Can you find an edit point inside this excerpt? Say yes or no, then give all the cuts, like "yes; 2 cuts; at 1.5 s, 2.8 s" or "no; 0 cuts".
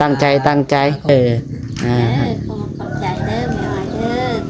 yes; 1 cut; at 1.1 s